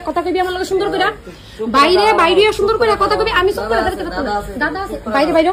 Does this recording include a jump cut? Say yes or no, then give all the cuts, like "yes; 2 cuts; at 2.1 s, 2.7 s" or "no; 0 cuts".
no; 0 cuts